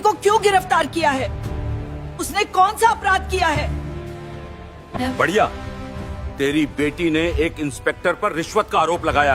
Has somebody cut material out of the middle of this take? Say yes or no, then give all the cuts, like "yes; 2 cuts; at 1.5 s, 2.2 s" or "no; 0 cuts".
no; 0 cuts